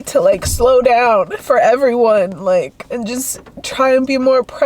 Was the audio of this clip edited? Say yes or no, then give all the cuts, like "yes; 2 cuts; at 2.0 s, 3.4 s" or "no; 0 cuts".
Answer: yes; 1 cut; at 1.4 s